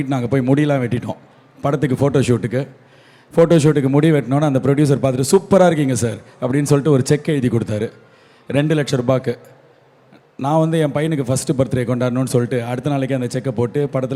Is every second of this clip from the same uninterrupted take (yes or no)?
yes